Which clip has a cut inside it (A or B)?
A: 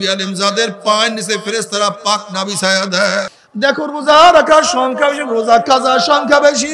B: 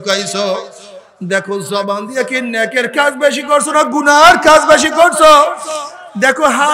A